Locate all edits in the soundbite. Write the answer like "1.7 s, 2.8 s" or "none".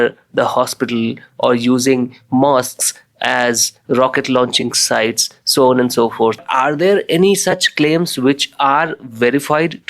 6.4 s